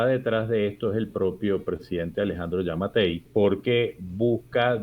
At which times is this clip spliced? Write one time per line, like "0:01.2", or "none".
0:03.2